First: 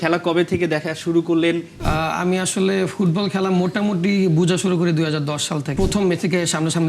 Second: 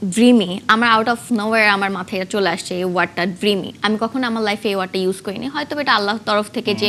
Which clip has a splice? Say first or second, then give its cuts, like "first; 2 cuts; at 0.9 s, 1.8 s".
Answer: first; 2 cuts; at 1.7 s, 5.7 s